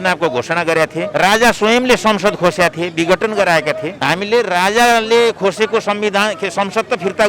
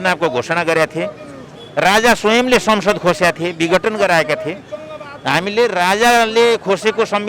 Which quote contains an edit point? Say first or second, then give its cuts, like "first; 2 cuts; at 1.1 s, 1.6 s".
first; 2 cuts; at 1.1 s, 3.9 s